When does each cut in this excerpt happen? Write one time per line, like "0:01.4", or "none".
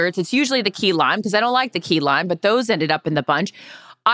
none

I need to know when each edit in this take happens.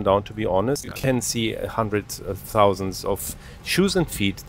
0:00.9

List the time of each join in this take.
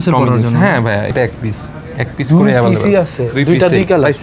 0:01.1

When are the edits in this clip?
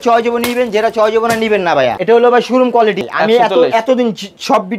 0:02.0
0:03.0

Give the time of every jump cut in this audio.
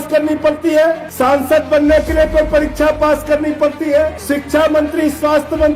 0:01.1
0:04.2

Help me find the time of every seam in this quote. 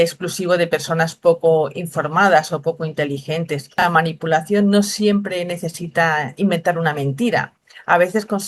0:03.8

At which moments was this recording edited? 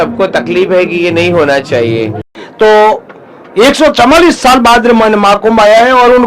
0:02.3

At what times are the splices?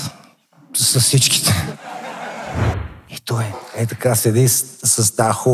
0:02.8

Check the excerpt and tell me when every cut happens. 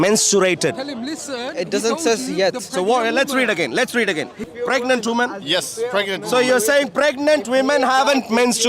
0:04.4

